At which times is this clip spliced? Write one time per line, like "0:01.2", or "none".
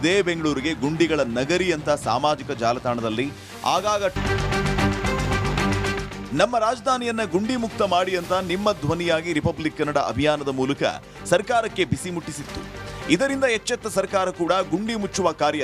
0:04.2